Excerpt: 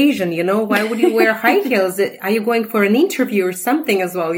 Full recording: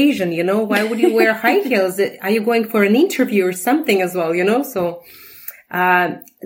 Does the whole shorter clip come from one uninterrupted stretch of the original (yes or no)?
yes